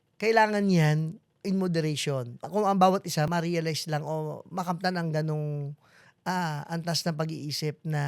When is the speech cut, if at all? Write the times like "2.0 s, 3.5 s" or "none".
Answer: 1.2 s, 2.4 s, 3.3 s